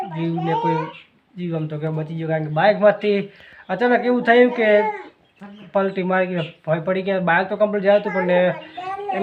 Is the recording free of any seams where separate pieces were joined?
yes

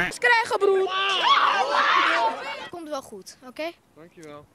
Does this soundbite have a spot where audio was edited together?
yes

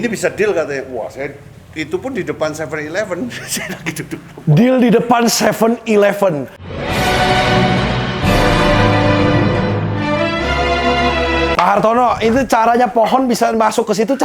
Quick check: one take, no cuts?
no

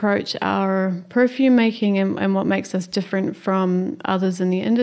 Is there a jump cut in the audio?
no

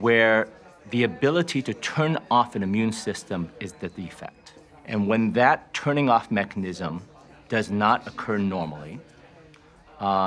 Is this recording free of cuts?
yes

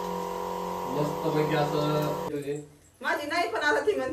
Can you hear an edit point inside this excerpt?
yes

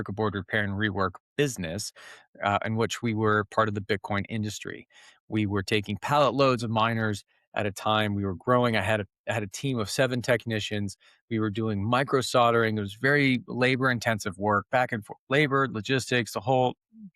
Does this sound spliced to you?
no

